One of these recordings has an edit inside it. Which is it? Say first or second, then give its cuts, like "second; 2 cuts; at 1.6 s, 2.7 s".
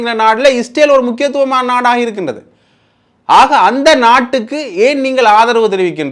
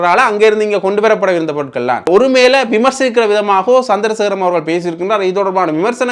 second; 1 cut; at 2.1 s